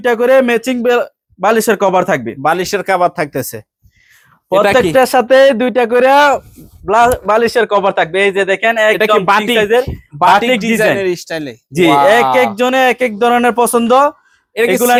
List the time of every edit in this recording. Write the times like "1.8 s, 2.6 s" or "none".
none

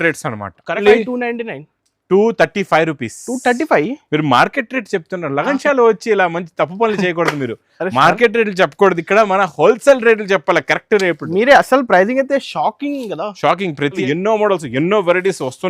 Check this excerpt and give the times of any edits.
0.8 s, 14.0 s

